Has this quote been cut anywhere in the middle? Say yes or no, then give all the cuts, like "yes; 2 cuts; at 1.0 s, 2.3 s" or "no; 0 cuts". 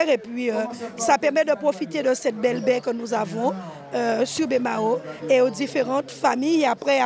no; 0 cuts